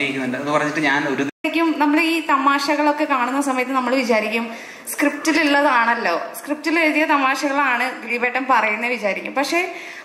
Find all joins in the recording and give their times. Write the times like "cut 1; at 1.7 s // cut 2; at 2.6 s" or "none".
cut 1; at 1.4 s